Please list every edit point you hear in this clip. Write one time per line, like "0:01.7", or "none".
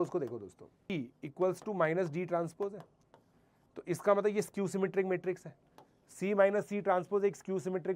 0:00.9